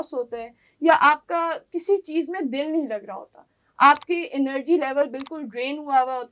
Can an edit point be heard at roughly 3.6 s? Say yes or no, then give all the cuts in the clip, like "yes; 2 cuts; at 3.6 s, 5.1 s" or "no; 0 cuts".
no; 0 cuts